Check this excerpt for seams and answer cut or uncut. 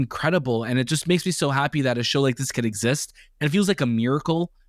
uncut